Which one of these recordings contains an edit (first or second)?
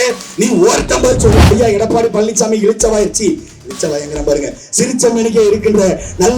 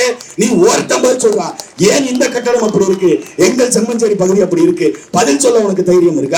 first